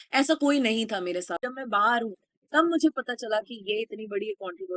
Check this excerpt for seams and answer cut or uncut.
cut